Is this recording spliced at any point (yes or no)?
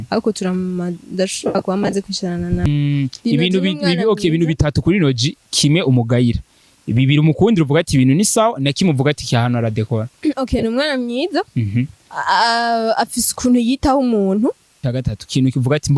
yes